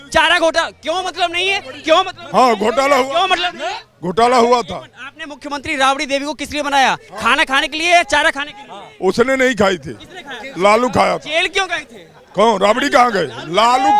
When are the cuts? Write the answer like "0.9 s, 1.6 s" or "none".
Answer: none